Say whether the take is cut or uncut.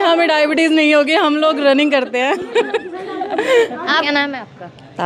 uncut